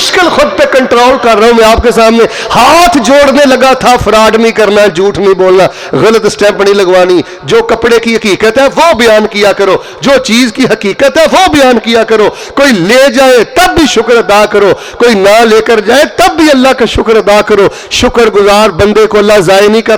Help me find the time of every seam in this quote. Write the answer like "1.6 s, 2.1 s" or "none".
none